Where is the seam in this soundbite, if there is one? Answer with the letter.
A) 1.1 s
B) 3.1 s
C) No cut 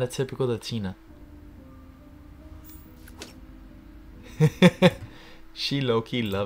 A